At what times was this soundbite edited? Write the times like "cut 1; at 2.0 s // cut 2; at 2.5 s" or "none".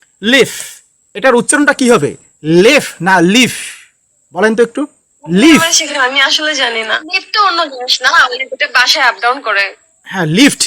cut 1; at 7.0 s